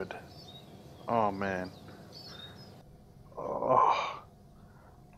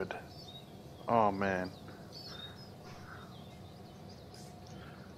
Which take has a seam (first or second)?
first